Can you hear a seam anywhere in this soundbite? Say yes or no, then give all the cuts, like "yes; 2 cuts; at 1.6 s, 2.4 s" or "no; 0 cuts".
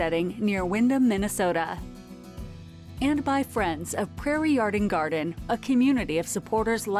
no; 0 cuts